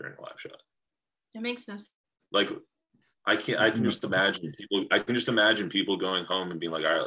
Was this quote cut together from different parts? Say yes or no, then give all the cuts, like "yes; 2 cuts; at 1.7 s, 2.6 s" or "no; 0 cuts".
yes; 1 cut; at 0.9 s